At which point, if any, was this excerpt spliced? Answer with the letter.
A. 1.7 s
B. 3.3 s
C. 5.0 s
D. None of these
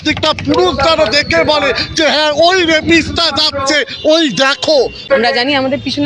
C